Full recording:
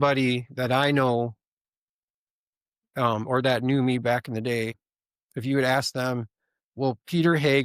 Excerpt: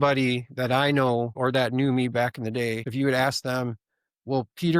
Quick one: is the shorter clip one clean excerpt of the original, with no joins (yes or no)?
no